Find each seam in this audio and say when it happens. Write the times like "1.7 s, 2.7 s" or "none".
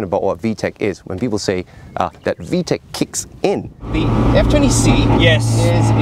3.9 s